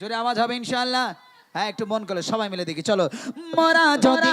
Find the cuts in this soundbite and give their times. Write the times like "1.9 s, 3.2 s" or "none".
none

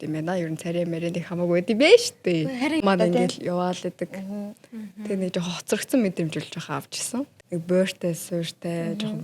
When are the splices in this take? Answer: 2.8 s, 7.3 s

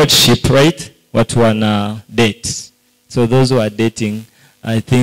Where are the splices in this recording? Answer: none

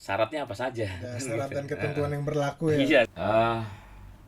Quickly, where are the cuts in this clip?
3.1 s

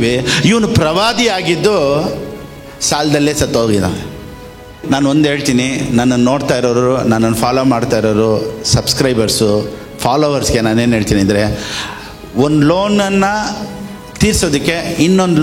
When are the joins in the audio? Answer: 4.8 s

